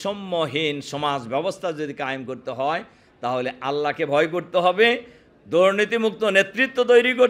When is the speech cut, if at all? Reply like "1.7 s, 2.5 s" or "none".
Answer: none